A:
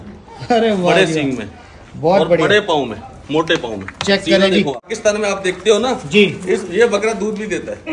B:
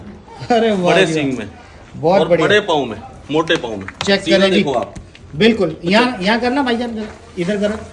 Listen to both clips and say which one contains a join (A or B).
A